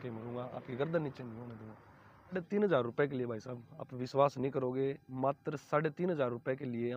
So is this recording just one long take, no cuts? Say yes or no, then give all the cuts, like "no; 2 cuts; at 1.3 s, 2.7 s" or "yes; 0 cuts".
no; 1 cut; at 2.3 s